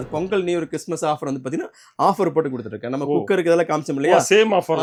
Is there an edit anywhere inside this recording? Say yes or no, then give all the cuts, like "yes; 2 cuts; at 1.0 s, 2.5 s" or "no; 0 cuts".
no; 0 cuts